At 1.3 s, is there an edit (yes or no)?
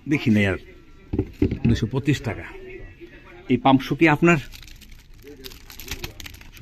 no